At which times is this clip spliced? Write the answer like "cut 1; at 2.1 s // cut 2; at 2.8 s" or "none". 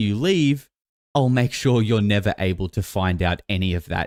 none